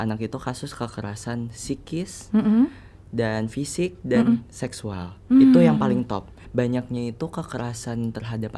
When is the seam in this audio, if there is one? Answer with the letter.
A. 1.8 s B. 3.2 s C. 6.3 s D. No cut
C